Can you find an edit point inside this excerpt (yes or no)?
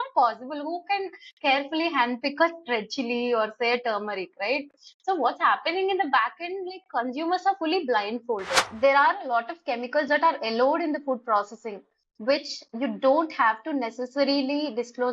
yes